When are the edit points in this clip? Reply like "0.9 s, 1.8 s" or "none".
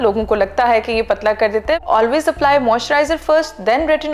1.8 s

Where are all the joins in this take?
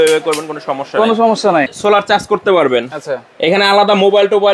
1.7 s

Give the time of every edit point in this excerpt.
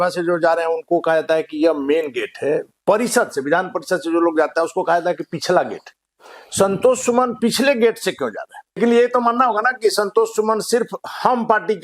8.8 s

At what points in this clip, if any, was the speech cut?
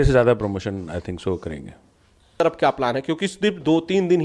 2.4 s

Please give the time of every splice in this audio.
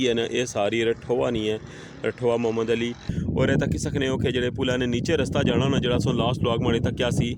3.1 s

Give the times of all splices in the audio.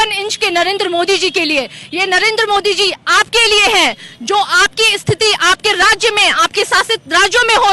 none

